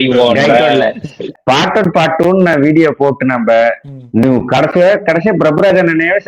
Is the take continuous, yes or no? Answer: no